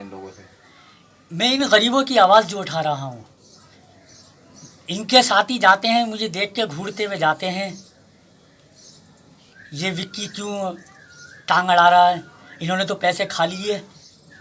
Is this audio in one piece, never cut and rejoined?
yes; 0 cuts

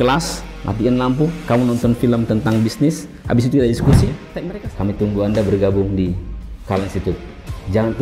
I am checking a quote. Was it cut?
yes; 1 cut; at 4.3 s

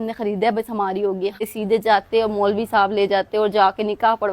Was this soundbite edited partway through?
yes; 1 cut; at 1.5 s

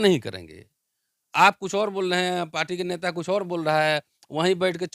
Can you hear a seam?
no; 0 cuts

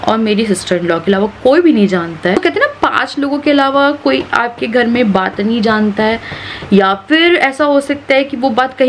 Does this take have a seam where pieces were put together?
yes; 1 cut; at 2.4 s

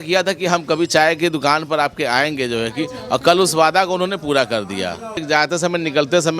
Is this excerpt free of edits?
no; 1 cut; at 5.2 s

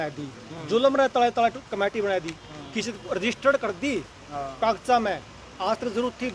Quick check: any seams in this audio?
no; 0 cuts

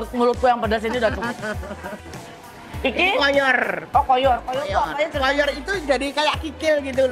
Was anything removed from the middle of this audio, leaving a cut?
no; 0 cuts

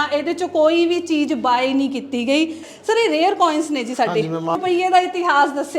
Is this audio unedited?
no; 2 cuts; at 2.6 s, 4.5 s

